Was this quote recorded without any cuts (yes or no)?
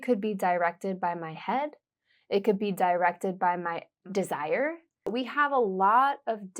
no